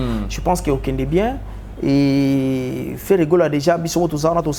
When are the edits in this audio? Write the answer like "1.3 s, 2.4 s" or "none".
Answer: none